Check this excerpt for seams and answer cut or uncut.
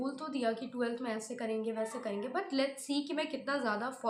uncut